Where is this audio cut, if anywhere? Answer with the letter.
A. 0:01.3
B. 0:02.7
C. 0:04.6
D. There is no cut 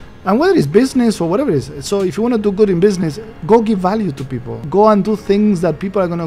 C